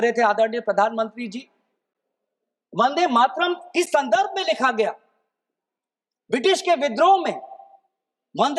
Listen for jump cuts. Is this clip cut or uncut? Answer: uncut